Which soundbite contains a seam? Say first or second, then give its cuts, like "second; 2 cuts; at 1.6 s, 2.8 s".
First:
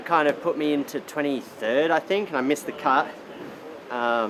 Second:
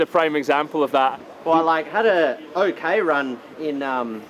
second; 1 cut; at 1.1 s